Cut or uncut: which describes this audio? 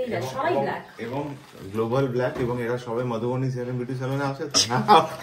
uncut